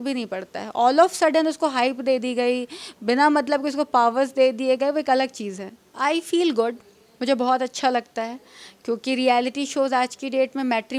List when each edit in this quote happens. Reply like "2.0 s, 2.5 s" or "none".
5.8 s